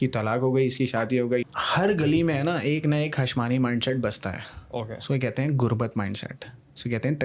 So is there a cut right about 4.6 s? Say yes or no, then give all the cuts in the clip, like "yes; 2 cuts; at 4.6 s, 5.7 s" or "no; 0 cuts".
no; 1 cut; at 1.5 s